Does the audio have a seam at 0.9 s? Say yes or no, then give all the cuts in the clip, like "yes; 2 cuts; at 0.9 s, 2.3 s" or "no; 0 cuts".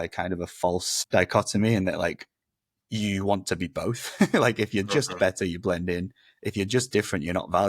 yes; 1 cut; at 0.9 s